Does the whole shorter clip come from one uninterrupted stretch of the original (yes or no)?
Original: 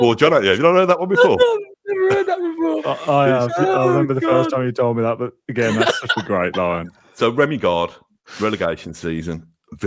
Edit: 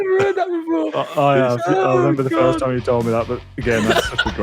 yes